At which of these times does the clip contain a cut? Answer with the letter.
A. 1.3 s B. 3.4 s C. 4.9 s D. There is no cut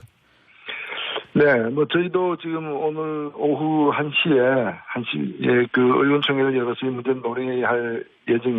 C